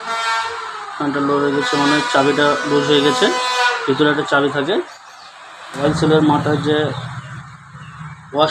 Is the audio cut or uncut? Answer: cut